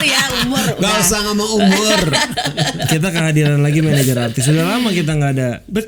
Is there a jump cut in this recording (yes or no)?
no